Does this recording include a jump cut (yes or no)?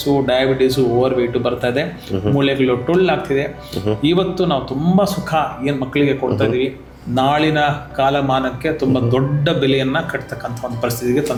no